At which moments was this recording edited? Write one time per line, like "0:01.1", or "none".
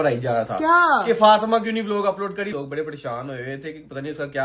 0:02.5